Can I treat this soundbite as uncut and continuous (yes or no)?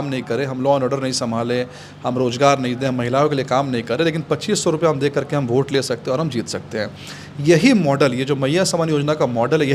yes